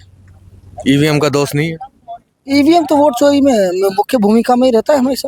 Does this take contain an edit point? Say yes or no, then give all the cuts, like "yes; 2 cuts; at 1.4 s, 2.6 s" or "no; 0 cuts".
no; 0 cuts